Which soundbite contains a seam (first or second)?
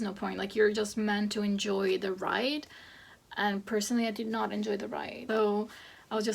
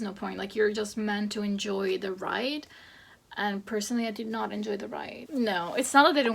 second